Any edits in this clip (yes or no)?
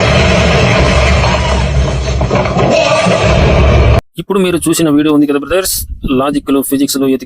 yes